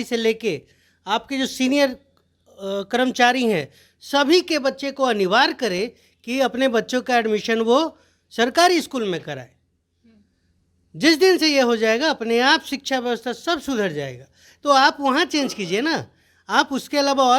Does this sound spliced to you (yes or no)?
no